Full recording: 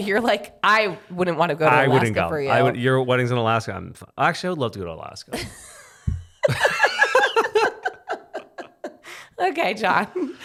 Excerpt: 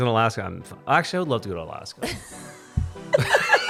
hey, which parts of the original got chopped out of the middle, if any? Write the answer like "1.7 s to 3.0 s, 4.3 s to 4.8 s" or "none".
none